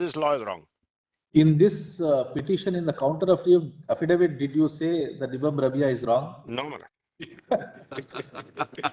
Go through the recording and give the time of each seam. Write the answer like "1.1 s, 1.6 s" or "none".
none